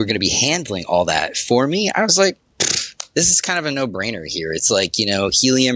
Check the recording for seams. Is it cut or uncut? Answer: uncut